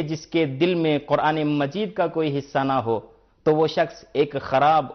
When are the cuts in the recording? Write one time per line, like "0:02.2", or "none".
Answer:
0:03.4